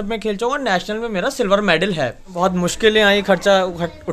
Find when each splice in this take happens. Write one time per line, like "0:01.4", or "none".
0:02.3